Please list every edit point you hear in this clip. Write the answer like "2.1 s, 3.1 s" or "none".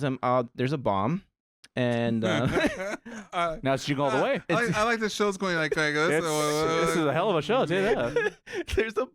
none